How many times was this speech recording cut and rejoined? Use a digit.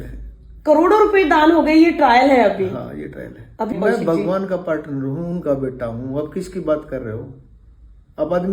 1